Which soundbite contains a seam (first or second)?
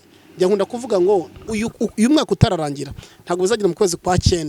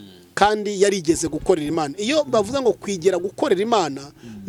first